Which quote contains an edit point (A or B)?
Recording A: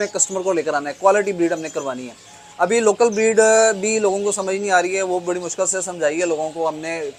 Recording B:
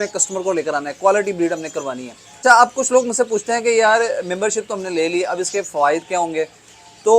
B